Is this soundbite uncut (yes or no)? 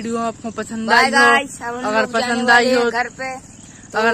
yes